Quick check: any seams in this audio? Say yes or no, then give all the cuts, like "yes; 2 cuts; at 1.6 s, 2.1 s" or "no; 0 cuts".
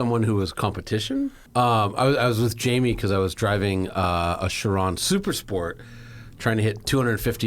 yes; 1 cut; at 1.4 s